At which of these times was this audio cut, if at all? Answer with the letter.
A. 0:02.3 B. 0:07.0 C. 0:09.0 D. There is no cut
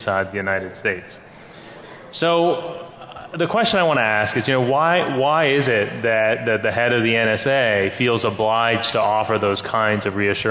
B